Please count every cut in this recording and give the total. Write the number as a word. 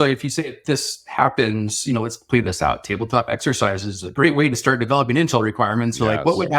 zero